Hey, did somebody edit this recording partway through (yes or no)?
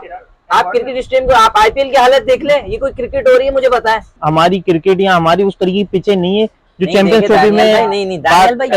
yes